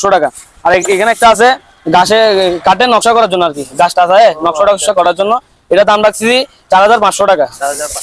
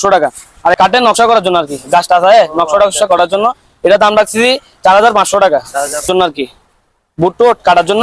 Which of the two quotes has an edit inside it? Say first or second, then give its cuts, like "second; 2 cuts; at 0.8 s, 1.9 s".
second; 2 cuts; at 0.7 s, 6.1 s